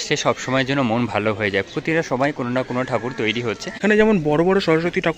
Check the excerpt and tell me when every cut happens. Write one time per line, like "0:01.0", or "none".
0:03.7